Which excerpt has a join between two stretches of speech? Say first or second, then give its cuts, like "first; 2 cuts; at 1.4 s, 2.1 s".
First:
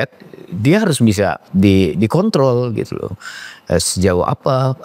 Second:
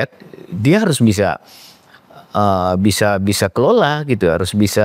first; 1 cut; at 1.4 s